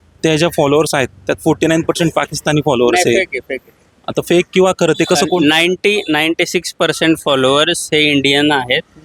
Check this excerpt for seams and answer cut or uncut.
uncut